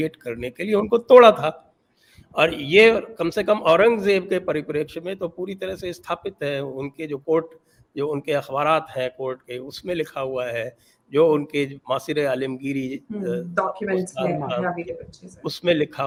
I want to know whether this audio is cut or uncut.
uncut